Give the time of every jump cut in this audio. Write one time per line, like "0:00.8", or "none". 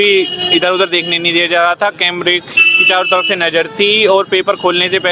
none

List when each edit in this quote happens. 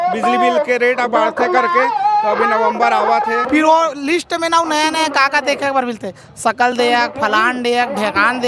0:03.4

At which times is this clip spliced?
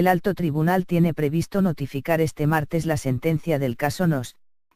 0:01.9

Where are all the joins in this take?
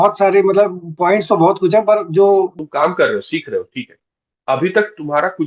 0:02.6

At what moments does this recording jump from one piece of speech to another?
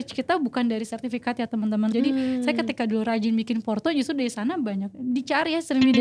0:01.9

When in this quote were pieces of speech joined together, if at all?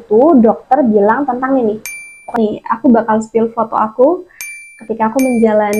0:02.2

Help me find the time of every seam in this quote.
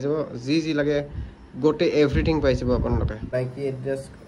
0:03.2

